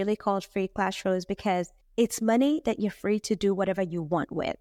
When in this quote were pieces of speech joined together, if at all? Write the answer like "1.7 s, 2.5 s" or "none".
none